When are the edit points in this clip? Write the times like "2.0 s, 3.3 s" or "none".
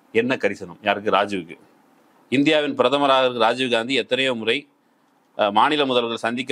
none